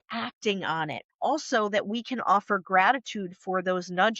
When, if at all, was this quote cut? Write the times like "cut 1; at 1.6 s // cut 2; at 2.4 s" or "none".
cut 1; at 1.0 s